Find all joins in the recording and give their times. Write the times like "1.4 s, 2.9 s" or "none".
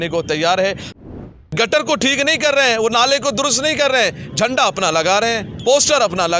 1.1 s, 5.5 s